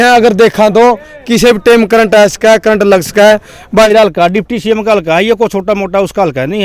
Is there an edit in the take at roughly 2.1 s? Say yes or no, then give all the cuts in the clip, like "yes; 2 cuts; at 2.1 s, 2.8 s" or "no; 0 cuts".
no; 1 cut; at 3.9 s